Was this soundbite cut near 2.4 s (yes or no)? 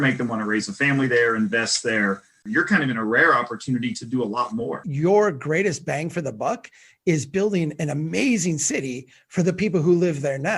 yes